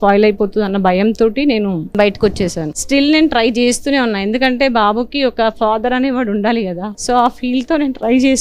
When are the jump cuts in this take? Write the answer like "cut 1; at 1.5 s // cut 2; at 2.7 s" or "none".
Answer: cut 1; at 1.9 s // cut 2; at 2.8 s // cut 3; at 6.9 s